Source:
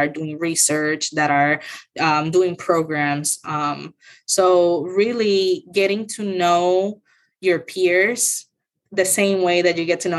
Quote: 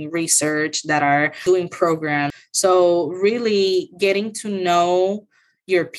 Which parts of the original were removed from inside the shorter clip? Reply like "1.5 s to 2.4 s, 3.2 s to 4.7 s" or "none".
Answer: 1.7 s to 2.3 s, 3.3 s to 4.2 s

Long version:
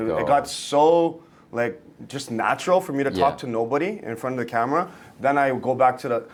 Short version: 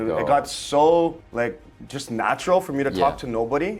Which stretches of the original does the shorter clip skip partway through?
1.2 s to 1.4 s

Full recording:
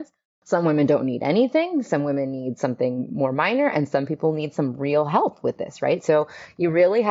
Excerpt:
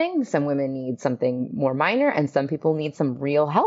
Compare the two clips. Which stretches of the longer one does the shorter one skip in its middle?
none

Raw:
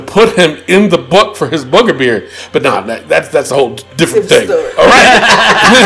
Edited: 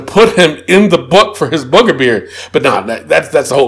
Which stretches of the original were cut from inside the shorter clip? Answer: none

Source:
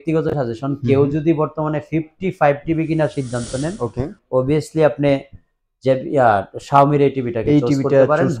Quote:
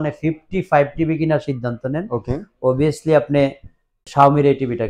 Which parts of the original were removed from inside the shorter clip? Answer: 5.7 s to 6.6 s

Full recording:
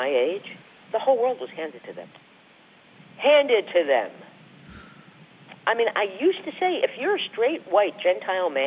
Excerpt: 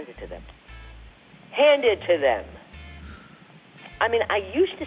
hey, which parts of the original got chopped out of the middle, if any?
none

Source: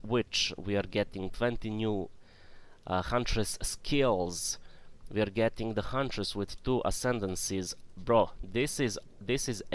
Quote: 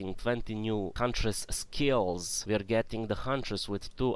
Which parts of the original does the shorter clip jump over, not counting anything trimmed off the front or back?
2.1 s to 3.1 s, 4.4 s to 5.0 s

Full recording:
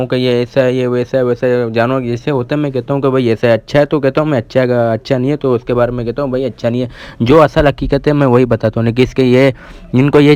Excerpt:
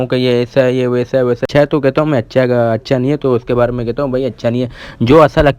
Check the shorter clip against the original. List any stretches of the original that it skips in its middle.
1.4 s to 3.6 s

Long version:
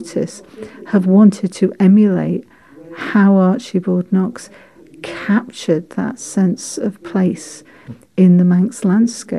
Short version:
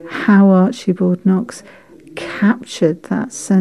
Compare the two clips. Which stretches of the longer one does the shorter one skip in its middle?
none

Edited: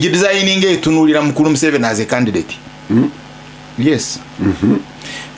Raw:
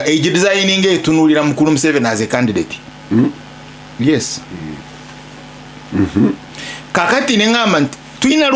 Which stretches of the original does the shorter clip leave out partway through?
4.4 s to 5.7 s

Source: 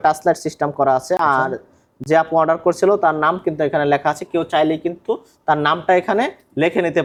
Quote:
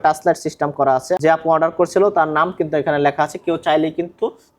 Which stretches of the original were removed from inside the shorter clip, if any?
1.2 s to 2.1 s

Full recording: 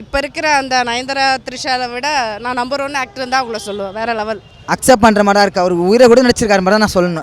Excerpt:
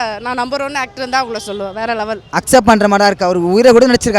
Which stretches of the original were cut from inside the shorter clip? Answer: 4.4 s to 4.6 s

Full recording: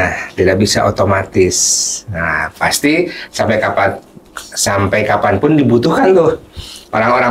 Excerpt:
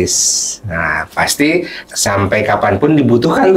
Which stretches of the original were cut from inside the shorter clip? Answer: 3.2 s to 4.4 s

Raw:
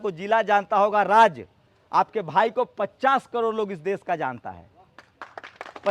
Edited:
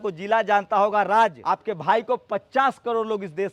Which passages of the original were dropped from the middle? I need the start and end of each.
1.4 s to 1.9 s

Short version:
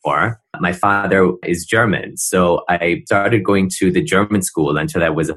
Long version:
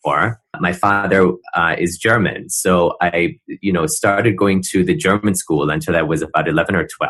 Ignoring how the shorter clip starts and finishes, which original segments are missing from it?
1.4 s to 1.7 s, 3.4 s to 4.0 s

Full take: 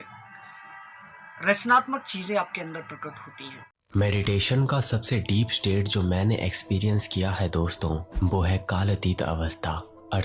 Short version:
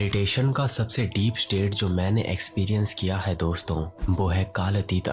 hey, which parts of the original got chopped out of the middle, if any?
none

